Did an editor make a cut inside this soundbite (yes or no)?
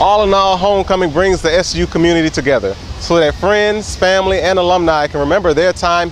no